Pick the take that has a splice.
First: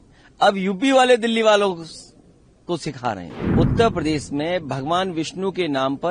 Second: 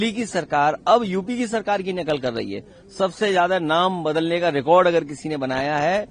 first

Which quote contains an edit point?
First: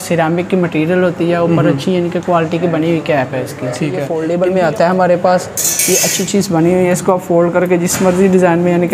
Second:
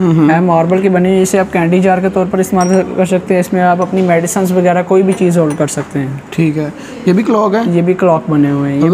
first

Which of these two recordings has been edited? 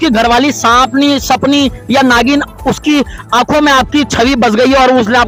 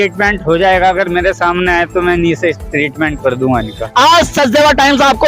second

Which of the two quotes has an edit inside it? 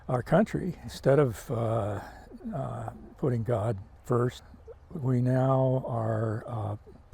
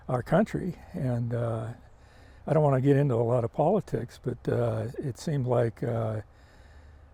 first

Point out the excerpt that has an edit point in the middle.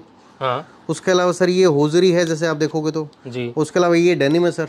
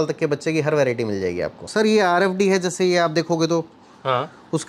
second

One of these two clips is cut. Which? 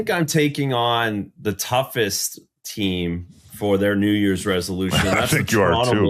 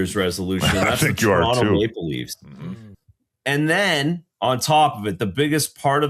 second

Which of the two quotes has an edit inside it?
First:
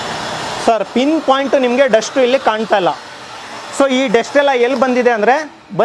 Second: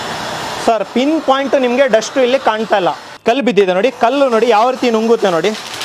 second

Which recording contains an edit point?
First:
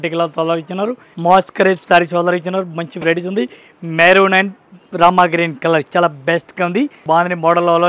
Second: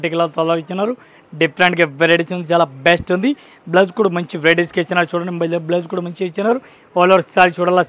first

